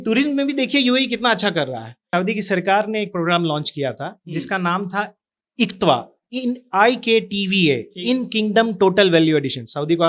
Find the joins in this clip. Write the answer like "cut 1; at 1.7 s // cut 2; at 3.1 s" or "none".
cut 1; at 2.1 s